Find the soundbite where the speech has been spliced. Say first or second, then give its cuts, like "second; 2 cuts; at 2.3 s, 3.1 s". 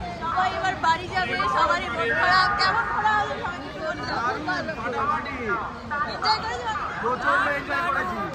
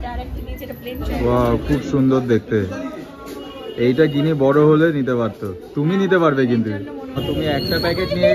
second; 2 cuts; at 1.1 s, 7.2 s